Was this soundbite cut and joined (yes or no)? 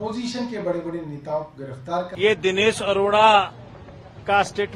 yes